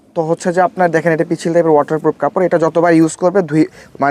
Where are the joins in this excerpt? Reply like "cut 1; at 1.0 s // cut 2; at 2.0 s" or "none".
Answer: none